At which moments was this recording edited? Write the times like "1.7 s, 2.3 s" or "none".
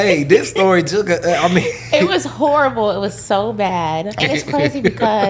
4.2 s